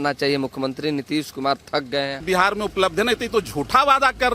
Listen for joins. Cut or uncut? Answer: cut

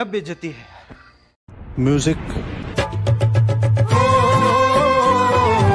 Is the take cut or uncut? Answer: uncut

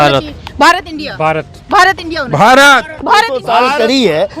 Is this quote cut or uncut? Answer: cut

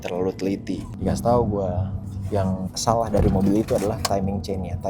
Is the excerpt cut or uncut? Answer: cut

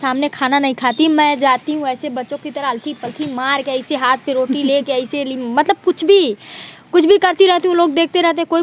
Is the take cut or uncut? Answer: uncut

